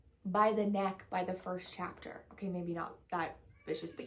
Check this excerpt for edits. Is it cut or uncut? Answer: uncut